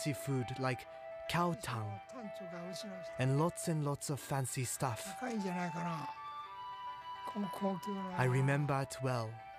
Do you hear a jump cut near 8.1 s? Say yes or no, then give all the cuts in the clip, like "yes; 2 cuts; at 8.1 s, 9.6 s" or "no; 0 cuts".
yes; 1 cut; at 8.1 s